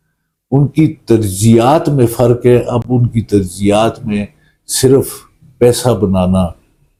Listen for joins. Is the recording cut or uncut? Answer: uncut